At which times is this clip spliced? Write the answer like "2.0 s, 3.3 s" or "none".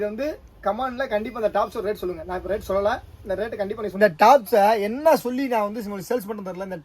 3.9 s